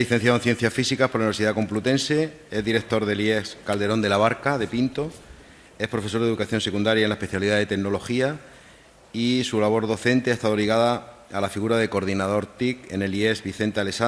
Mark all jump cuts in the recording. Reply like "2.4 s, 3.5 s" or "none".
none